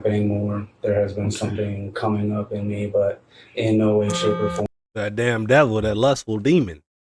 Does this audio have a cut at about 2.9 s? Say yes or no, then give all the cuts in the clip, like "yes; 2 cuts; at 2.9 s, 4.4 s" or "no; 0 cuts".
no; 0 cuts